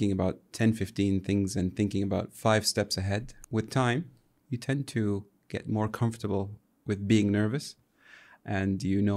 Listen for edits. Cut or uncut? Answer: cut